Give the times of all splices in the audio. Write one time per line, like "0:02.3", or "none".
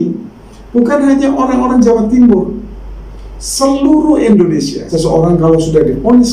0:04.8